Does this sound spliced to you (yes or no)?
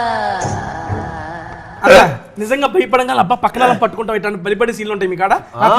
yes